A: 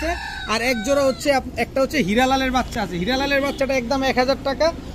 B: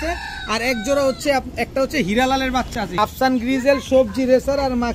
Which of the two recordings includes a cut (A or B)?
B